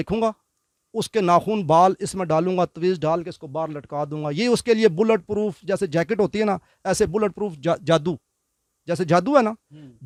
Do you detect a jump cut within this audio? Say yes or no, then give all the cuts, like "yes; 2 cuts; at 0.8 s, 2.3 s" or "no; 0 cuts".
no; 0 cuts